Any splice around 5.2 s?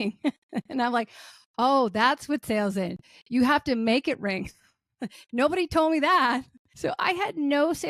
no; 1 cut; at 6.6 s

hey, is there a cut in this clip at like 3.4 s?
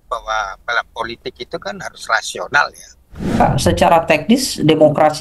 yes; 1 cut; at 3.4 s

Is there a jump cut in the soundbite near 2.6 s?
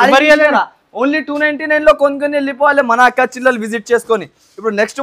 no; 0 cuts

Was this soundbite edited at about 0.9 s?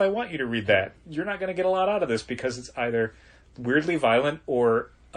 yes; 1 cut; at 0.9 s

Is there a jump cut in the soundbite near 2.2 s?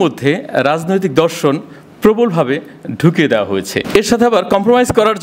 no; 1 cut; at 3.9 s

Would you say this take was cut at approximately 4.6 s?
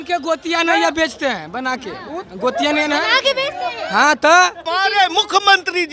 yes; 1 cut; at 4.6 s

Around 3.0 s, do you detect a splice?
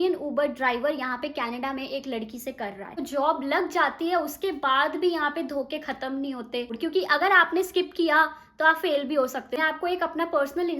yes; 3 cuts; at 3.0 s, 6.7 s, 9.5 s

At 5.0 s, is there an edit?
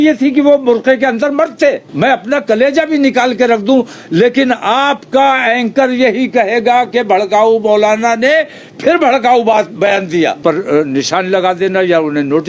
no; 2 cuts; at 1.9 s, 10.4 s

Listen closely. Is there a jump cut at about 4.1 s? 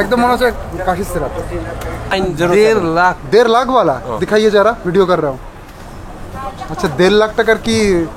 no; 1 cut; at 2.1 s

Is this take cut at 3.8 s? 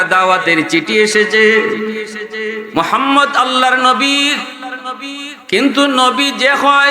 no; 1 cut; at 2.6 s

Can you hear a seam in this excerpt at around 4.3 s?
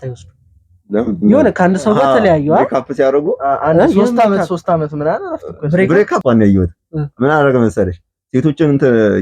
no; 1 cut; at 6.2 s

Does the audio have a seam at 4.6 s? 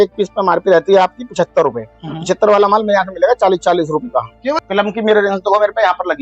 yes; 1 cut; at 4.6 s

